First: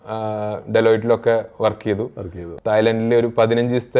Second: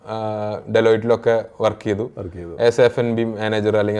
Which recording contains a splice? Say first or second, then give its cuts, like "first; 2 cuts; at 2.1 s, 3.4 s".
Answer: first; 1 cut; at 2.5 s